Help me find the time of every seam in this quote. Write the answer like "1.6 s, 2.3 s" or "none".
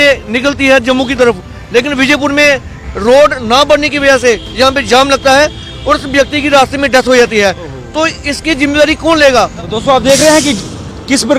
9.6 s